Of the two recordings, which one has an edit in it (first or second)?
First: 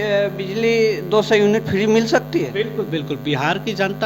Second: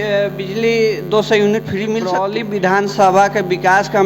second